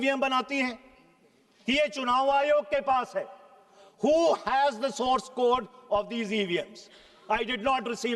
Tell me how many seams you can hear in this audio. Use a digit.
0